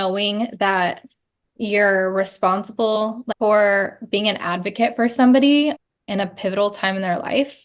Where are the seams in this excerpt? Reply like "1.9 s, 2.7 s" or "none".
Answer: 3.0 s, 5.8 s